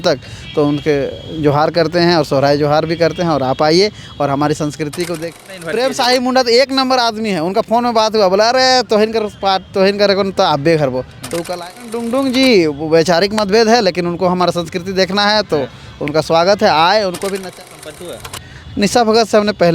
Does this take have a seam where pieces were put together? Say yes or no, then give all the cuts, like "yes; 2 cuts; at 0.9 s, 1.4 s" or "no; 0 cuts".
yes; 3 cuts; at 5.3 s, 12.1 s, 17.6 s